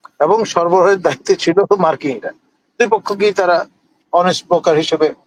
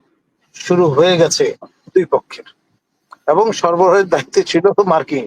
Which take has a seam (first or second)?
second